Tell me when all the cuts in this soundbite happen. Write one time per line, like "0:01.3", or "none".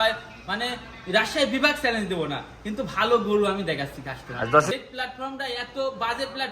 0:04.7